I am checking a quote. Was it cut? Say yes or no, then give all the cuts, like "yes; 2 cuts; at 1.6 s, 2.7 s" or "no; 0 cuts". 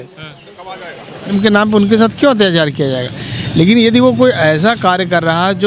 yes; 1 cut; at 1.3 s